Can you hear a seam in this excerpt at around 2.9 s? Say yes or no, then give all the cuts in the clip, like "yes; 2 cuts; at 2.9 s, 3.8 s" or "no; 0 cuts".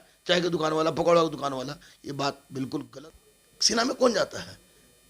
yes; 1 cut; at 2.9 s